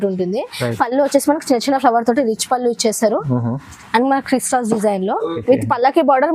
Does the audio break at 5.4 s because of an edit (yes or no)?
yes